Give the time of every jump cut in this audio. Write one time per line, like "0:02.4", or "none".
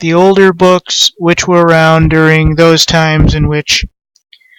0:01.3